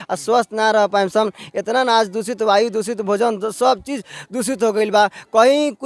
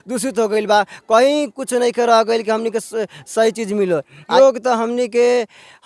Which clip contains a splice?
second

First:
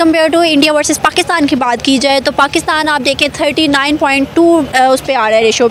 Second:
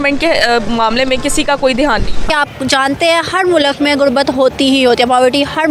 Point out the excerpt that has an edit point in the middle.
second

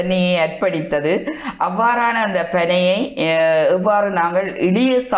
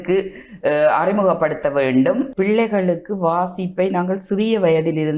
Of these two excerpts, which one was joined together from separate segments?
second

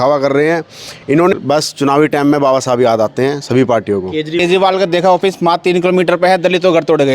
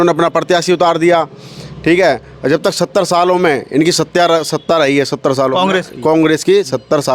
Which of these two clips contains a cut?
first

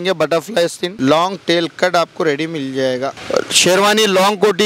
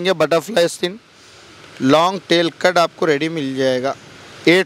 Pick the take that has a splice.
first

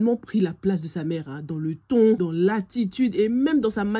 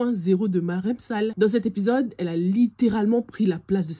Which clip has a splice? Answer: first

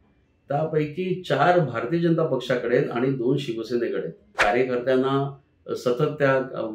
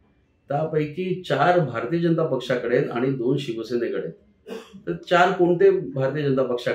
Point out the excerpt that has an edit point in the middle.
first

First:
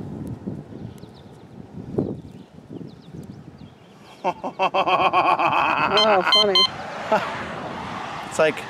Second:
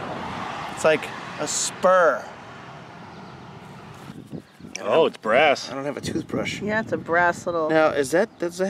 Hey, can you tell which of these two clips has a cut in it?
second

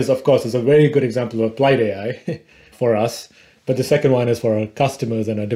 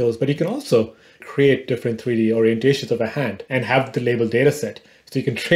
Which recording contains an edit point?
second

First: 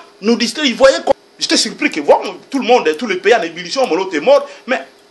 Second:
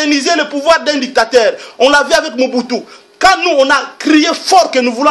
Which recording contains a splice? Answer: first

